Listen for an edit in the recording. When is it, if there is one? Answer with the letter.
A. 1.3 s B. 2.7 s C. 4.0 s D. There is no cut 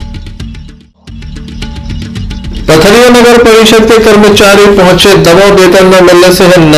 A